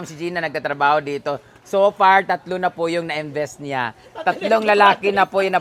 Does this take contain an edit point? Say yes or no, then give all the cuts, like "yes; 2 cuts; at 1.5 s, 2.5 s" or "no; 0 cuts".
no; 0 cuts